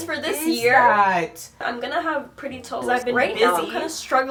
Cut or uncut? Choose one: uncut